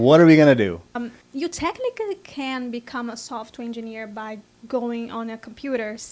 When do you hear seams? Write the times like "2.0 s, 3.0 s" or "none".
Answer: 1.1 s